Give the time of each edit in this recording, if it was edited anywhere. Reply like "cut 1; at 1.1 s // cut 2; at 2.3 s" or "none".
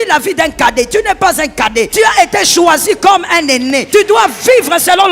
cut 1; at 1.9 s // cut 2; at 3.8 s